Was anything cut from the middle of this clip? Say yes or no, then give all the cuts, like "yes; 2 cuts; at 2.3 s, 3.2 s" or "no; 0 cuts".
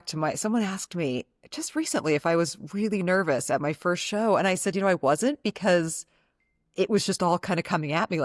no; 0 cuts